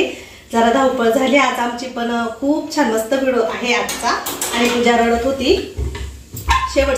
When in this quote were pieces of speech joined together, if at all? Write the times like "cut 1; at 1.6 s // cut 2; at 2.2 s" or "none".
cut 1; at 4.5 s